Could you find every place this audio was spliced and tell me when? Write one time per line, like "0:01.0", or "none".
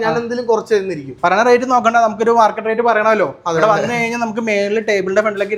none